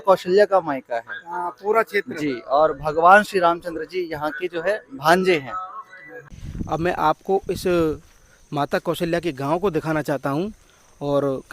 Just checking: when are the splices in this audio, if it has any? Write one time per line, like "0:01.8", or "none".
0:06.3